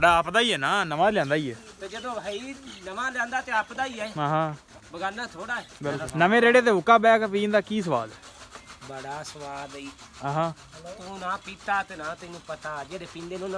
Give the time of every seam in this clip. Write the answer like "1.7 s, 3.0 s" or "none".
6.0 s